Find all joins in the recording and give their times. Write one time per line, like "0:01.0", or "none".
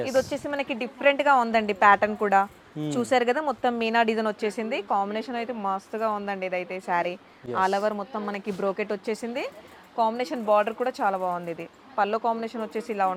none

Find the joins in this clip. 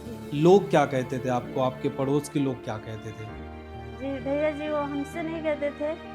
none

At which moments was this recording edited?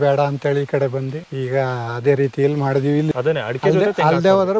0:01.2
0:03.1

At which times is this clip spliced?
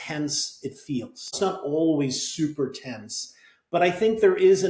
0:01.3

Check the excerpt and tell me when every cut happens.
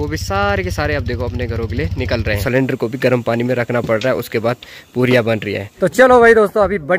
0:02.4
0:05.7

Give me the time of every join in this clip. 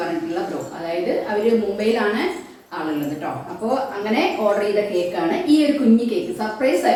none

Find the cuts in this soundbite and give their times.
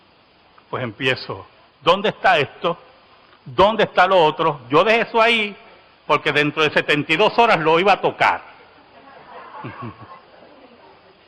0:08.1

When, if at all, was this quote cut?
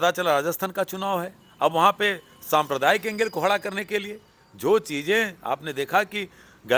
none

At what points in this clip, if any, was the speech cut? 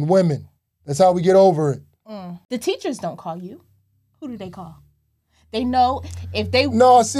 0:02.3

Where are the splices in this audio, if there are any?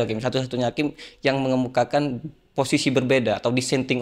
none

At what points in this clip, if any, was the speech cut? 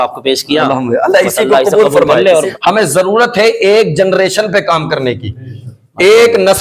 0:02.5

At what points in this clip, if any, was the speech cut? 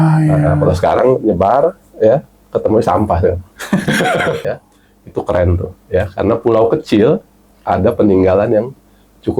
0:04.5

